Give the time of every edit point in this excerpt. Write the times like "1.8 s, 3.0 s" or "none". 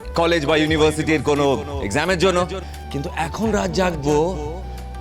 2.7 s